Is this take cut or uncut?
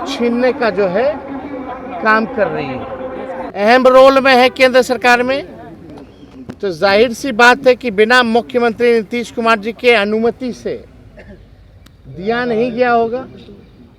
cut